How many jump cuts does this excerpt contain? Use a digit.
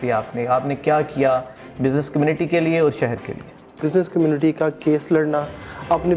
1